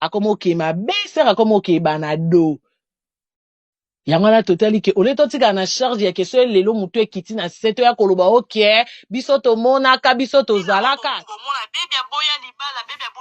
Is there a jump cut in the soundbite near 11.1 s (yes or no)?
yes